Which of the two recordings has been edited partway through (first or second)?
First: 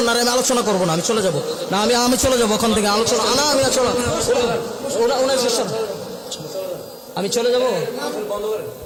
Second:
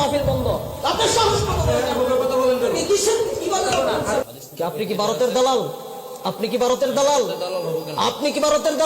second